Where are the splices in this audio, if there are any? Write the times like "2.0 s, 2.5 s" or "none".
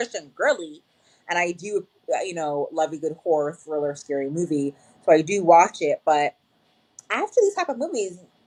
none